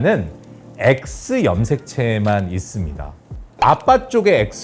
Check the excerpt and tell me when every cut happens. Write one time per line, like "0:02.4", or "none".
0:03.4